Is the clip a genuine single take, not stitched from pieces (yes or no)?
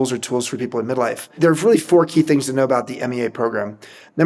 no